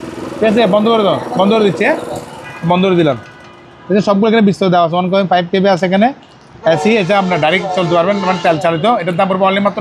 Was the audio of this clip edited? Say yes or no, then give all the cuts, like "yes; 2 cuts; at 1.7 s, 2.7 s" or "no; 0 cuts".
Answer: no; 0 cuts